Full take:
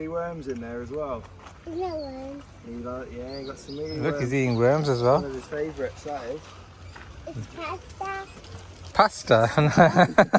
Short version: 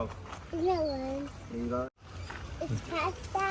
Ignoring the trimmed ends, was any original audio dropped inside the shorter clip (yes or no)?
yes